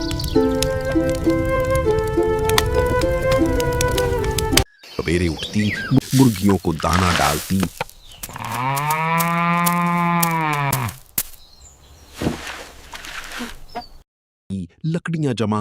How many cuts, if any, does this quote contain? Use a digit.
1